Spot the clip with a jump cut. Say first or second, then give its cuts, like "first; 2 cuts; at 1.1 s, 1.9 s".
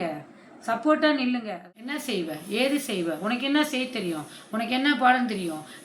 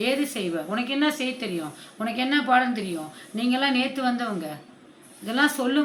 first; 1 cut; at 1.5 s